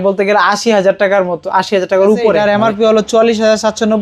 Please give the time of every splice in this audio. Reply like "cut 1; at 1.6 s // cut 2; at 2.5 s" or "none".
cut 1; at 2.4 s